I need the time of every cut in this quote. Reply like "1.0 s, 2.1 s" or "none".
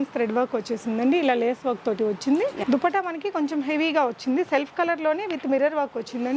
2.6 s